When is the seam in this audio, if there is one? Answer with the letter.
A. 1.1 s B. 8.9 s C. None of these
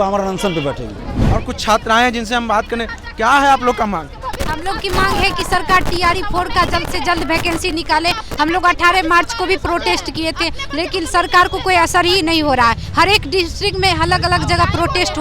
A